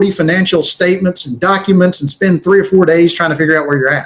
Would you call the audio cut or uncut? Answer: uncut